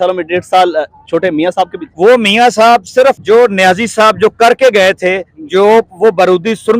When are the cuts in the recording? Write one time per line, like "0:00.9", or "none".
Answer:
0:01.8
0:03.2